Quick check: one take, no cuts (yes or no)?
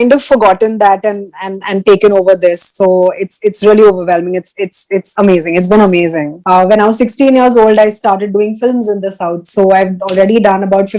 no